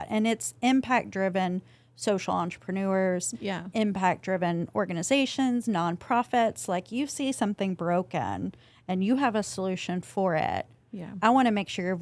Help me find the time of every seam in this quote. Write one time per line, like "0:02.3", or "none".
none